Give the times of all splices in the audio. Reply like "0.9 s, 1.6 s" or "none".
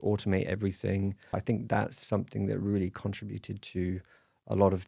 1.4 s